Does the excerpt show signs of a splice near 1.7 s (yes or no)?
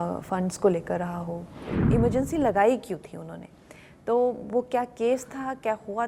yes